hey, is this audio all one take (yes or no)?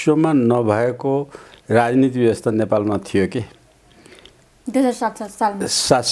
yes